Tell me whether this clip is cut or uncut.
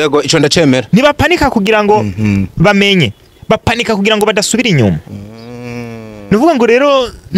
uncut